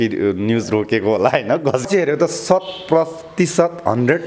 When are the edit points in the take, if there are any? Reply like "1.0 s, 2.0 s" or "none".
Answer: 1.9 s